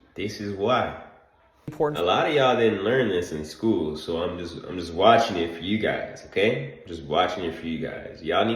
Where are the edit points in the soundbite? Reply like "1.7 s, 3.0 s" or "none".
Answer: 1.7 s